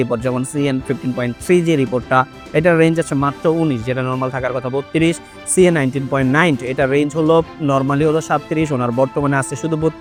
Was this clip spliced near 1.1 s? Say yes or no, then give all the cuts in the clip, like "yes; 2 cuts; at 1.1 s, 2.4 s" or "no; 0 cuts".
no; 0 cuts